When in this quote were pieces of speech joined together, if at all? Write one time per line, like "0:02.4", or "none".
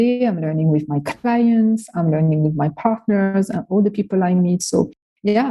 none